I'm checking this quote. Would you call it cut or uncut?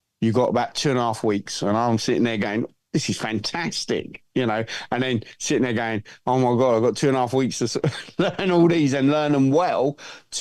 uncut